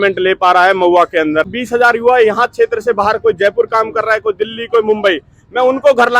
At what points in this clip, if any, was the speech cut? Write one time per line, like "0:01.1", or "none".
0:01.5